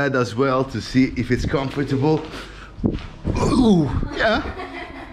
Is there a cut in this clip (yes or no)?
no